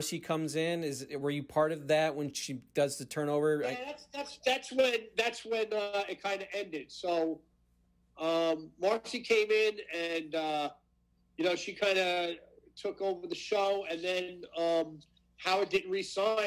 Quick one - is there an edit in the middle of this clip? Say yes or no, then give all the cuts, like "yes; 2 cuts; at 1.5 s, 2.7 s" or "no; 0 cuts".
no; 0 cuts